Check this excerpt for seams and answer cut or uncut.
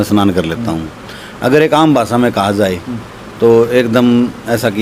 uncut